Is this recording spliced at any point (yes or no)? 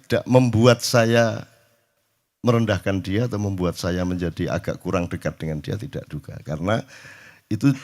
no